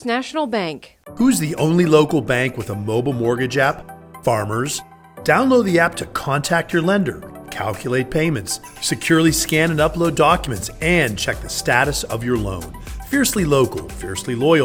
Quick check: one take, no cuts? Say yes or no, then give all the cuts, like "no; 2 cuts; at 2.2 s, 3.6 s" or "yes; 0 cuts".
yes; 0 cuts